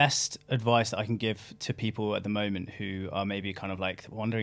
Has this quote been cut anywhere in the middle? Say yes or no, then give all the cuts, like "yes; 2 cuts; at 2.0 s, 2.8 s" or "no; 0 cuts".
no; 0 cuts